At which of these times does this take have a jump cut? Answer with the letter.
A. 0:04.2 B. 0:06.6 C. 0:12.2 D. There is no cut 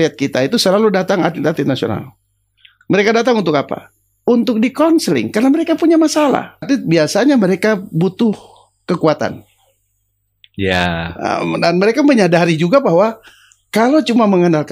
B